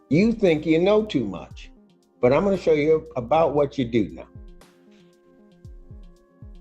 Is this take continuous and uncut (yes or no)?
no